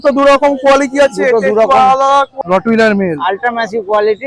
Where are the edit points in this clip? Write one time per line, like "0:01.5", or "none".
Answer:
0:02.3

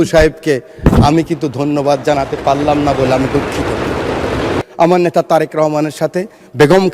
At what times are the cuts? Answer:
0:04.6

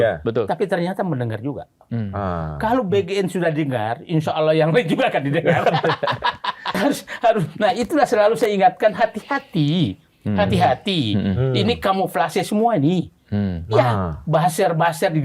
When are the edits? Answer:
0:06.8

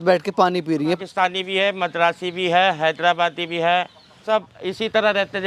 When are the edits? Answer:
0:01.0
0:04.2

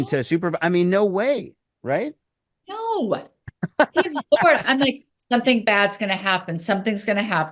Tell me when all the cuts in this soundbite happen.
none

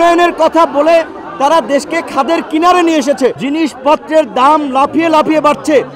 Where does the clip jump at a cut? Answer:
0:03.3

